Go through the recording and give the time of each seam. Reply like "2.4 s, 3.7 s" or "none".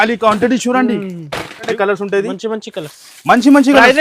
1.7 s

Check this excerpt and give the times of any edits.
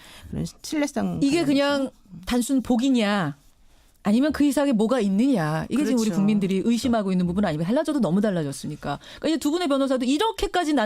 5.5 s

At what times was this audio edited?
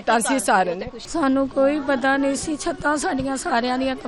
0.9 s

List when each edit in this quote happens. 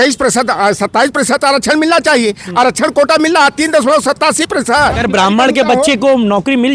5.0 s

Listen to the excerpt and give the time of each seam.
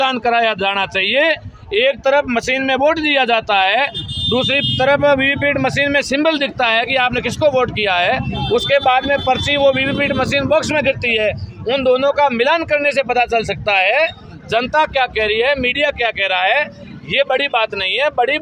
none

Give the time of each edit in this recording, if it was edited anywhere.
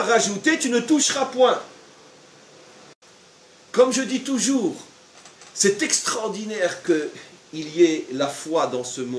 3.0 s

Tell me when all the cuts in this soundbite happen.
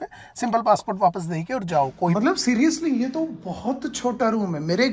2.1 s

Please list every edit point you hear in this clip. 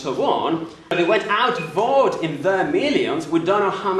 0.9 s

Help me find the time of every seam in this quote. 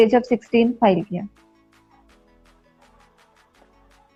none

